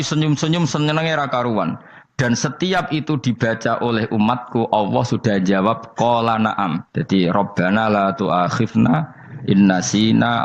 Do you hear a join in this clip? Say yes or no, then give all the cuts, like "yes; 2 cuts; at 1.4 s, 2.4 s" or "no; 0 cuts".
yes; 1 cut; at 6.3 s